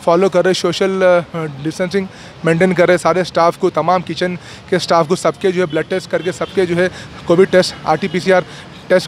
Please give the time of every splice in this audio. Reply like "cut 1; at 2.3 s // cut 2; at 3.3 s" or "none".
none